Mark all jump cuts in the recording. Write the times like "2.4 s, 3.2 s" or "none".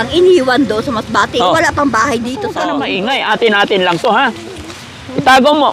2.6 s

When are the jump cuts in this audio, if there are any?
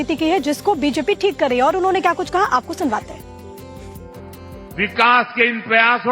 1.5 s

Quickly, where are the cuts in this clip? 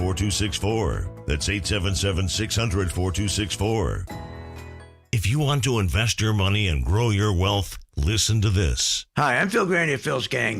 5.2 s

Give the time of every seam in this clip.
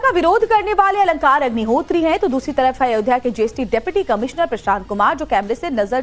3.9 s

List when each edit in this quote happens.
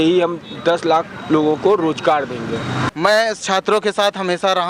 2.8 s

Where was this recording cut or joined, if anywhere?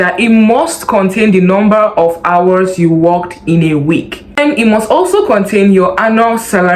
none

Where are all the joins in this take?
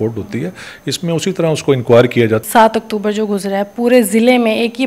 2.4 s

